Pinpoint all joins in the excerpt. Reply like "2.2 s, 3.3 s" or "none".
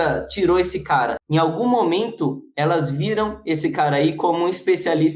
1.2 s